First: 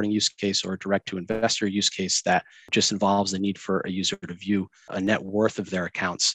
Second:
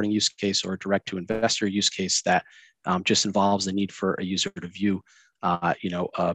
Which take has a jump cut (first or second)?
first